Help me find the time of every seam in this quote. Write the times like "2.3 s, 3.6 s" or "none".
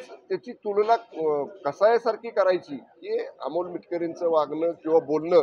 none